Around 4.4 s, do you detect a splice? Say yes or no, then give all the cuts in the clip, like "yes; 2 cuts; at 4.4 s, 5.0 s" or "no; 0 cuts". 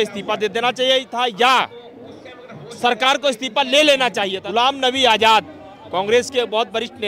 yes; 1 cut; at 4.4 s